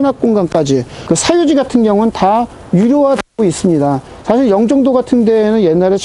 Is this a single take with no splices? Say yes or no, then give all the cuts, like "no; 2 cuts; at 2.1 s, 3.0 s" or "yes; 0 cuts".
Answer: no; 1 cut; at 1.0 s